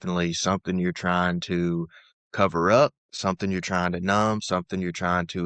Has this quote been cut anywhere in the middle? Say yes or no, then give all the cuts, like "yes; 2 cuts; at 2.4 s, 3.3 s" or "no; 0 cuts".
no; 0 cuts